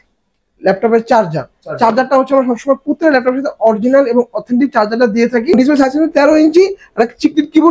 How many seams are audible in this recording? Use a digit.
1